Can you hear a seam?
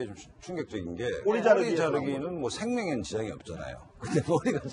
yes; 1 cut; at 1.8 s

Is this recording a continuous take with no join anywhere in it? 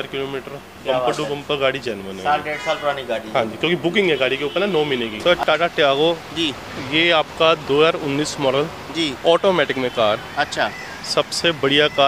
no; 1 cut; at 5.1 s

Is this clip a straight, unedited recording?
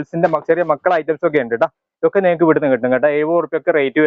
yes; 0 cuts

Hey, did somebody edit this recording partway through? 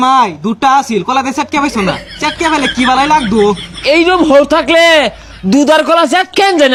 no; 0 cuts

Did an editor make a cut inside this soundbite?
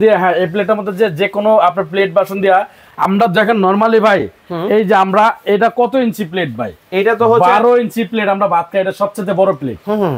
no; 0 cuts

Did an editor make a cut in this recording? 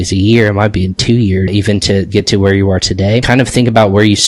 yes; 2 cuts; at 1.5 s, 3.2 s

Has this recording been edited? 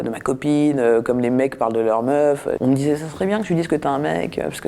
no; 0 cuts

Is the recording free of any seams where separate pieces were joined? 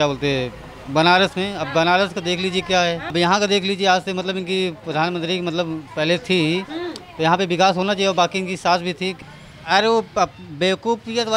no; 2 cuts; at 3.1 s, 9.1 s

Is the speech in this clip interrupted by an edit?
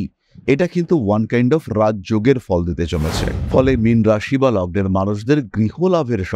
no; 0 cuts

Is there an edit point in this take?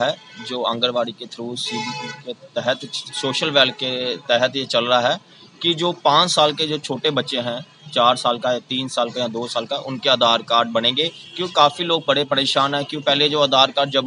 no; 0 cuts

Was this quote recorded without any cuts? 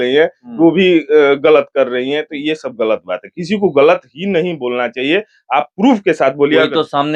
yes; 0 cuts

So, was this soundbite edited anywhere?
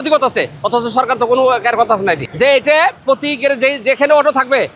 yes; 1 cut; at 2.3 s

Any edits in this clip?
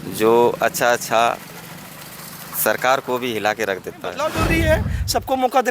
yes; 1 cut; at 4.4 s

